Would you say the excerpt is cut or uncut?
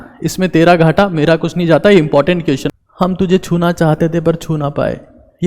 cut